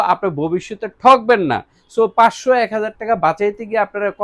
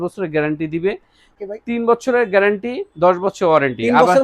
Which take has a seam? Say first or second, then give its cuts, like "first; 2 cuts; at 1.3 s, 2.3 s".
second; 1 cut; at 1.3 s